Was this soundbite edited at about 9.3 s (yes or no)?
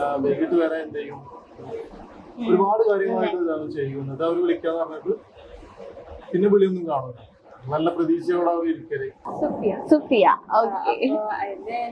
yes